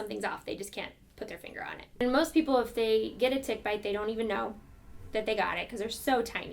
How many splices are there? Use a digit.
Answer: 1